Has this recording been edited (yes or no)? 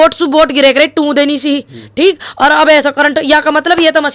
no